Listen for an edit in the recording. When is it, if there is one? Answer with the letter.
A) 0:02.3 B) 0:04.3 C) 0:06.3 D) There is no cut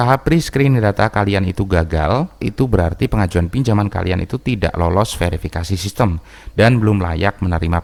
D